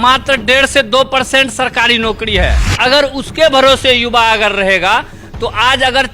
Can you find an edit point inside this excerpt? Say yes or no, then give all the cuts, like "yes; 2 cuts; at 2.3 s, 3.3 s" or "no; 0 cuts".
yes; 1 cut; at 2.6 s